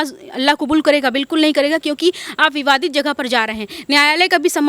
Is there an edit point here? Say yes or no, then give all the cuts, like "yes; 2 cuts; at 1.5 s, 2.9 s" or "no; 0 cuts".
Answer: no; 0 cuts